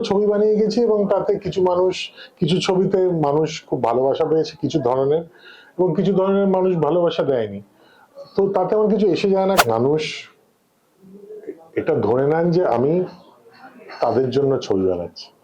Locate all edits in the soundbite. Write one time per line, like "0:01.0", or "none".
0:09.6